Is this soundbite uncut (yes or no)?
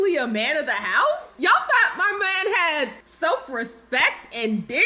no